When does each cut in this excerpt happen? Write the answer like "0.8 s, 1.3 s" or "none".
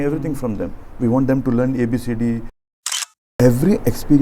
2.9 s